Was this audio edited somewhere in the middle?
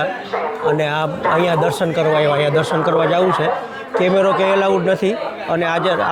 no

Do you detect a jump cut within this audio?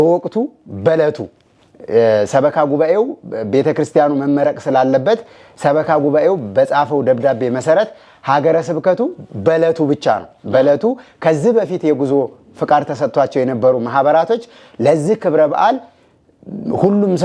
no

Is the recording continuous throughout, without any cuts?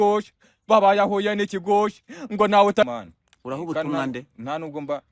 no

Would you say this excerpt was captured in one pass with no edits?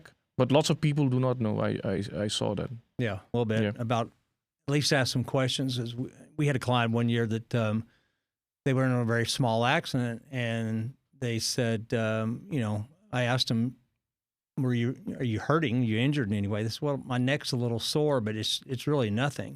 no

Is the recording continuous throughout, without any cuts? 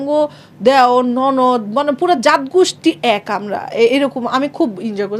yes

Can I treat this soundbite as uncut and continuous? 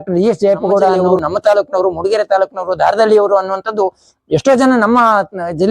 no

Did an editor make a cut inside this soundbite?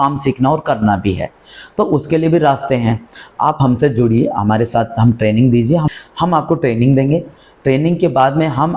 yes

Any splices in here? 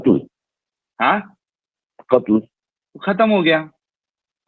no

